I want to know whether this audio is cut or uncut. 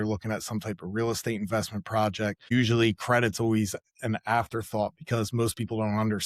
cut